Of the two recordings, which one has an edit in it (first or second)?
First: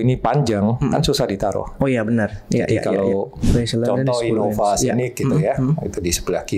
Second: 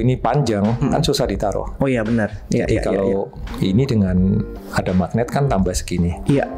first